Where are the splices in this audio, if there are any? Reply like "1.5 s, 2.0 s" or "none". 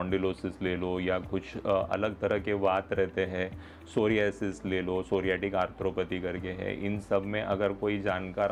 none